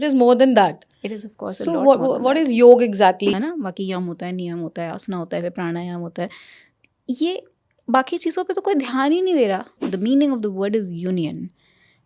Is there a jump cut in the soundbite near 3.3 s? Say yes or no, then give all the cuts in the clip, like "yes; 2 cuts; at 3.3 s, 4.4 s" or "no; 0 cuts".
yes; 2 cuts; at 3.3 s, 9.8 s